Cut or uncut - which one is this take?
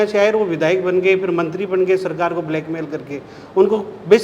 uncut